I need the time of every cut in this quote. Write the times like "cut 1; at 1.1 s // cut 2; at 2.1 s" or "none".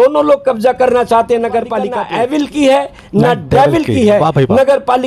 cut 1; at 2.0 s